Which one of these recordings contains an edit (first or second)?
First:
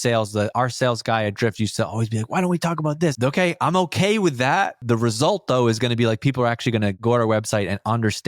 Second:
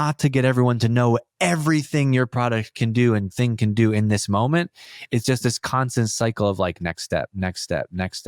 first